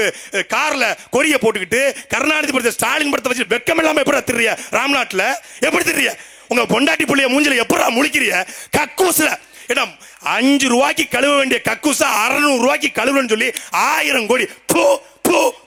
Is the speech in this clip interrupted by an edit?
no; 0 cuts

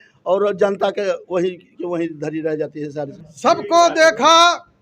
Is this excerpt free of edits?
no; 1 cut; at 3.2 s

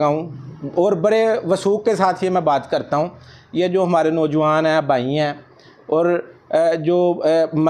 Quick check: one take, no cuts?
yes; 0 cuts

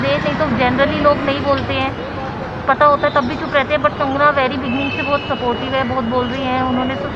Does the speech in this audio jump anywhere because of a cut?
no; 0 cuts

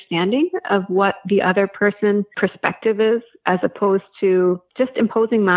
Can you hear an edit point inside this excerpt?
yes; 2 cuts; at 2.3 s, 4.7 s

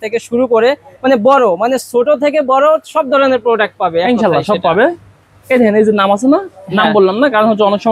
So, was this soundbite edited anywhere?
no; 0 cuts

